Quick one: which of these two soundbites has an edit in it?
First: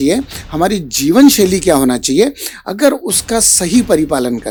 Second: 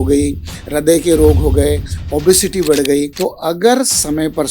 second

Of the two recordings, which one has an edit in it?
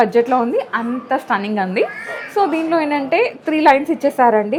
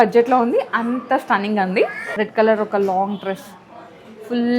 second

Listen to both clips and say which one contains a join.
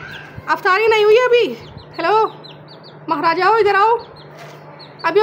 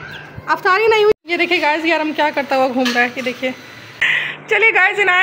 second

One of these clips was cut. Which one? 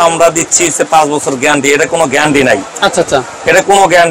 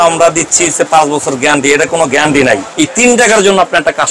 second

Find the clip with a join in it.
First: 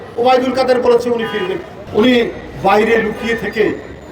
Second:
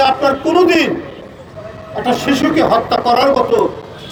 first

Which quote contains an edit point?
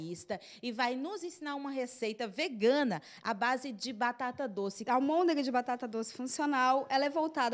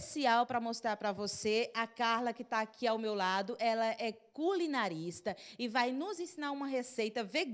first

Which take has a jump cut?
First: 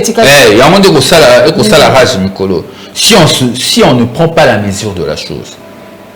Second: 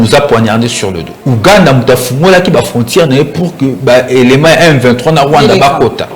second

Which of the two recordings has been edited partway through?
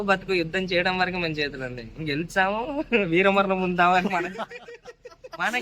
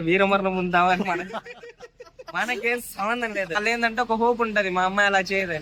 second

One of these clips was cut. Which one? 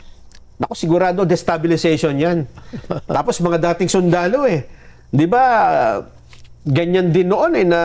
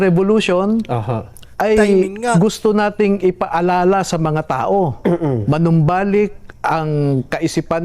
second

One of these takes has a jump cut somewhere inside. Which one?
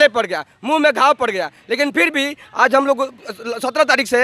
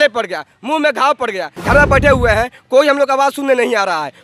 second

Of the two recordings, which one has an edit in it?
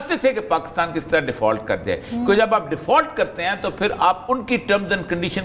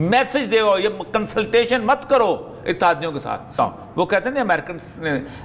second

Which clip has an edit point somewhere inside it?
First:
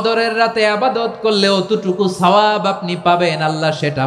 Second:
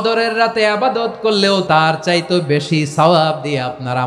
second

